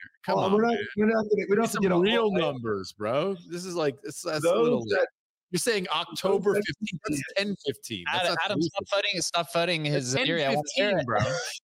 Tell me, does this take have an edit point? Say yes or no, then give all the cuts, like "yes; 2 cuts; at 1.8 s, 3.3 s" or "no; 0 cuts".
yes; 1 cut; at 10.2 s